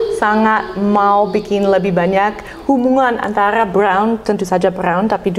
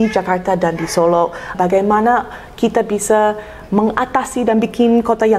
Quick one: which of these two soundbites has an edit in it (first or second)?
second